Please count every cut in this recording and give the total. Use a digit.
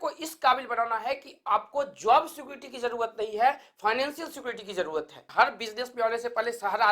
1